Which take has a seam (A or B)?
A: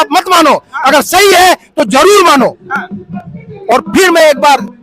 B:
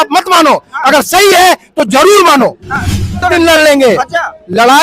B